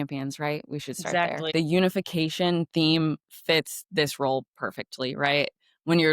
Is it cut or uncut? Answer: cut